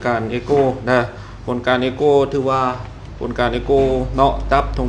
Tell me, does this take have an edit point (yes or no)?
no